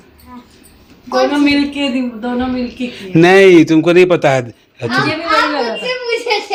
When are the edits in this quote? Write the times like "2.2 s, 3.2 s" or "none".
none